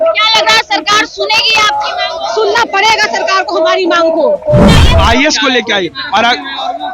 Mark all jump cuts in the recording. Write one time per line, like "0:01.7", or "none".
0:04.8